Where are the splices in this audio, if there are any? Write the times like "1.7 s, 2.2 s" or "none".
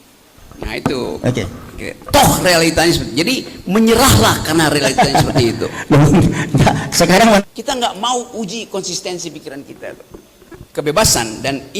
7.4 s, 10.6 s